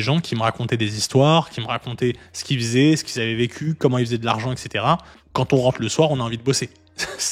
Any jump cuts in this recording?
no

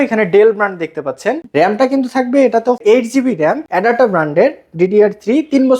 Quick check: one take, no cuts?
no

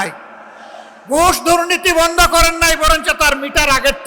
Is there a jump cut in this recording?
no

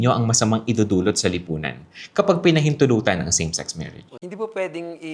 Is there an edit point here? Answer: yes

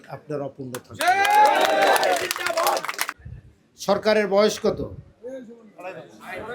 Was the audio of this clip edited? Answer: yes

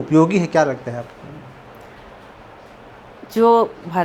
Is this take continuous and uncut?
yes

